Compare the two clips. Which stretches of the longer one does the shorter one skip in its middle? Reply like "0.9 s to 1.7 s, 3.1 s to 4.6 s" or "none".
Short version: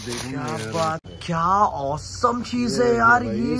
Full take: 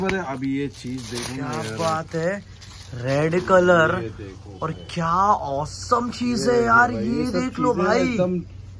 2.1 s to 4.7 s

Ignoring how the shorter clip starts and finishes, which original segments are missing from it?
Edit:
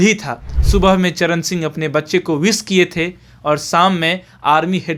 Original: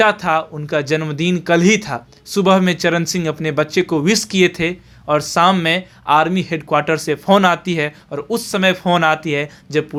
none

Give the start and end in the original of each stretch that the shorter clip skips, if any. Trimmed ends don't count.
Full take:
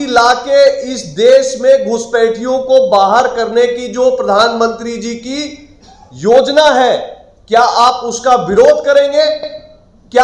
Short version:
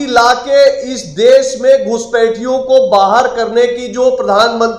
none

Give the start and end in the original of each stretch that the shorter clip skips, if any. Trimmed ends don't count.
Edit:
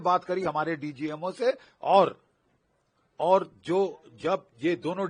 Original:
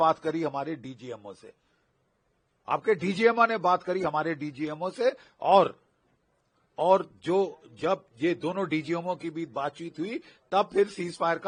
none

